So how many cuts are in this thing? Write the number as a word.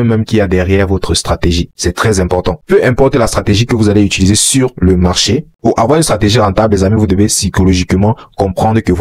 two